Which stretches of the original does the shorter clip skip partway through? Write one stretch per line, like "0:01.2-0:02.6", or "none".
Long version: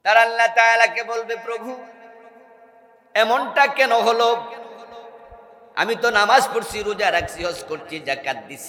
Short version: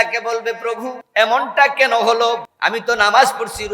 0:01.8-0:02.9
0:04.5-0:05.6

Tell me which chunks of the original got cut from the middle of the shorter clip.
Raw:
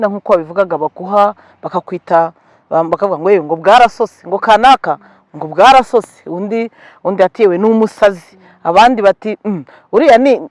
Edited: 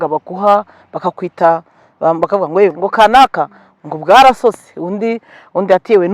0:03.4-0:04.2

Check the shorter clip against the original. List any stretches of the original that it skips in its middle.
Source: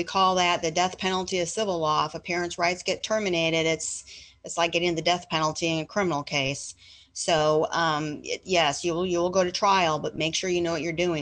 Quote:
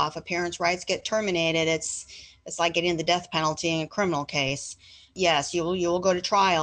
0:07.0-0:08.3

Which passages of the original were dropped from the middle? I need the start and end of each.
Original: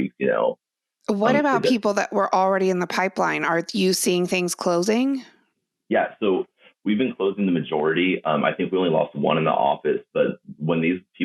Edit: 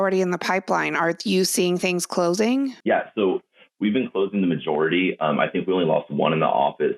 0:05.2-0:05.8

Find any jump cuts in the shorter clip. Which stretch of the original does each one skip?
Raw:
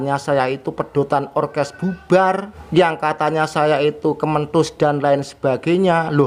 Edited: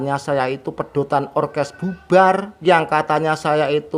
0:02.5-0:02.6

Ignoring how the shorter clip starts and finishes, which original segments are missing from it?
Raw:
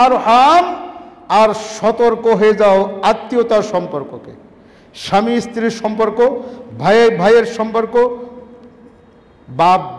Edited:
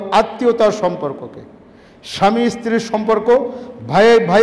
none

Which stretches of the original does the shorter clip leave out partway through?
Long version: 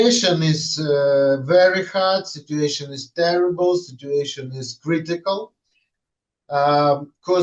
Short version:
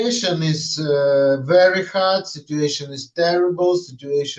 none

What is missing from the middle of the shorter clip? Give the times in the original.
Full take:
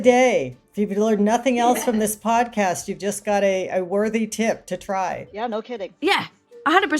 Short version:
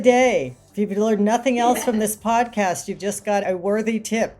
0:03.4-0:03.7

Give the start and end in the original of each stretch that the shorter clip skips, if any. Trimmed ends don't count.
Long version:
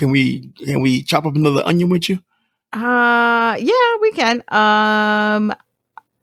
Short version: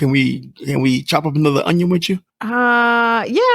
0:02.3-0:02.7

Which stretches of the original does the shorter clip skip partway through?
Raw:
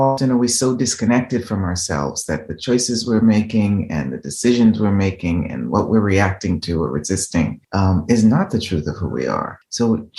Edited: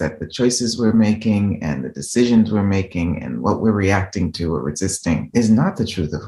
0:07.6-0:08.0

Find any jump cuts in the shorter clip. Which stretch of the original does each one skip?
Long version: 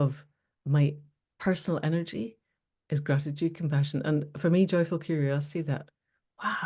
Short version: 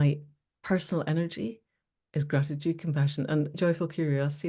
0:04.3-0:04.7

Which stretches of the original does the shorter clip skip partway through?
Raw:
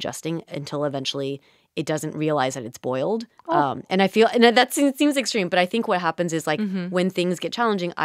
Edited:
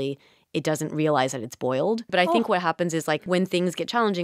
0:03.3-0:05.5
0:06.6-0:06.9

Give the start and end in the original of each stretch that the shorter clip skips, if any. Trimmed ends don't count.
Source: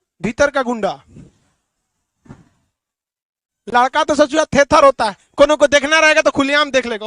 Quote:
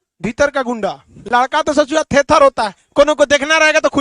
0:01.1-0:03.5

